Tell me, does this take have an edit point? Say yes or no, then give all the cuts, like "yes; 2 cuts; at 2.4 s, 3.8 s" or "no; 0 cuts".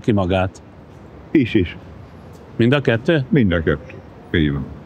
no; 0 cuts